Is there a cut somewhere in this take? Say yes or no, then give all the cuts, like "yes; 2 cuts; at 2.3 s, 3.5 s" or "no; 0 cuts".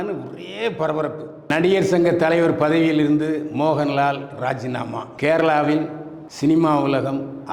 yes; 1 cut; at 1.4 s